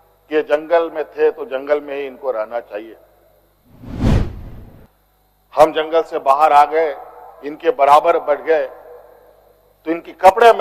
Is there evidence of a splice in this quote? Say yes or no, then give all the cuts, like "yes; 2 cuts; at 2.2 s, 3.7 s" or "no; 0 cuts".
no; 0 cuts